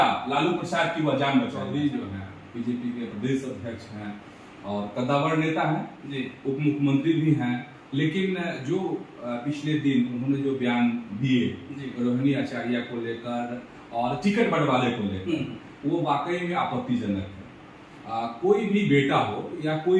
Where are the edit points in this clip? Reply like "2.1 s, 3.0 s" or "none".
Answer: 1.6 s